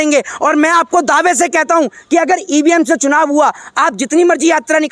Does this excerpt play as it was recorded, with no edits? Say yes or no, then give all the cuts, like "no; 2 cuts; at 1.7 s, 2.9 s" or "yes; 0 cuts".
yes; 0 cuts